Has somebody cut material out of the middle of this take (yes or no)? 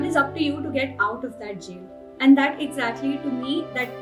no